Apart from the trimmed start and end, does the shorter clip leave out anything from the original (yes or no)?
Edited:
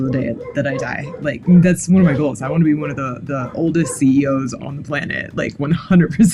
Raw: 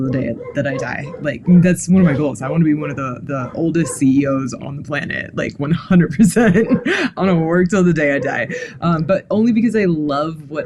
no